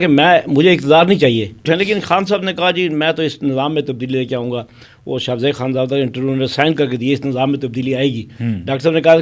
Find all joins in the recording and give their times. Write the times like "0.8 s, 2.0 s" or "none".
1.6 s